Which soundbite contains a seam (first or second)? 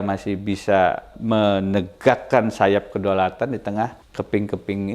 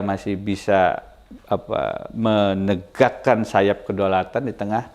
first